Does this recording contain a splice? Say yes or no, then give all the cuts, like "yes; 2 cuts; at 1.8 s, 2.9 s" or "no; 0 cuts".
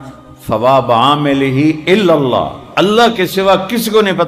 no; 0 cuts